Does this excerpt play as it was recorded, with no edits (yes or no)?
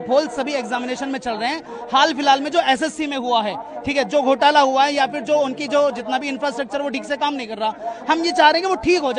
yes